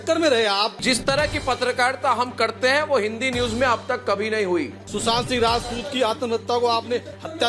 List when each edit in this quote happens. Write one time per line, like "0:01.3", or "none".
0:00.8
0:04.8

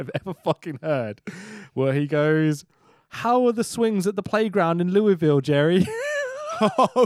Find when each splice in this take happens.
none

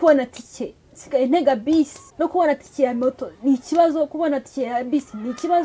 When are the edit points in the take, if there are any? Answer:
0:02.0

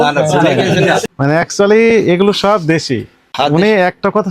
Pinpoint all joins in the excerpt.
0:01.1
0:03.2

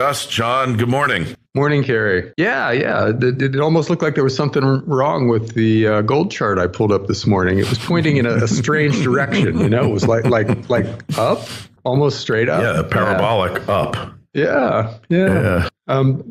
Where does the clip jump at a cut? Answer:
0:06.5

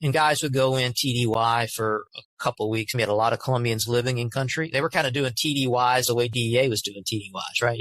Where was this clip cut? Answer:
0:02.9

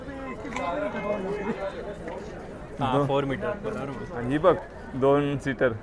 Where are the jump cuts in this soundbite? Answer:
0:04.1

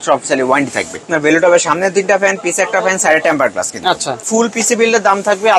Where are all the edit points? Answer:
0:01.1
0:04.3

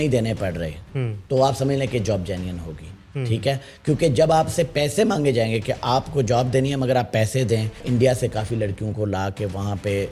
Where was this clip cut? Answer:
0:07.8

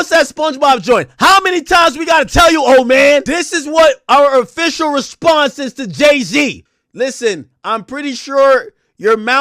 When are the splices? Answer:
0:03.3
0:06.6

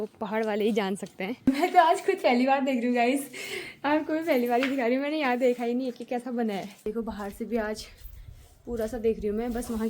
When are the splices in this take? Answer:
0:01.5
0:06.9

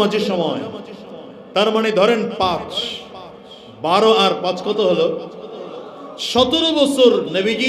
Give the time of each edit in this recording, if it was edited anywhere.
none

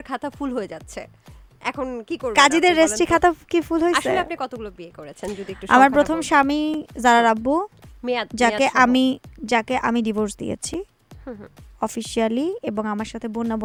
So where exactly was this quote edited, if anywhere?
none

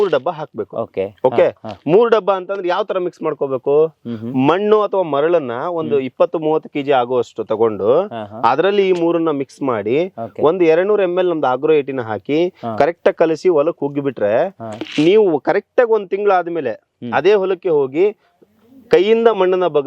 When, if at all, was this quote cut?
none

